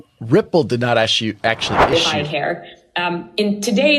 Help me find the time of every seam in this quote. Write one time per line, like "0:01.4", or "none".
0:01.8